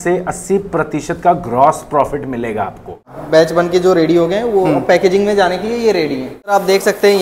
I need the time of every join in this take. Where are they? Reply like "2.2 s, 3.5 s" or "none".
3.1 s, 6.5 s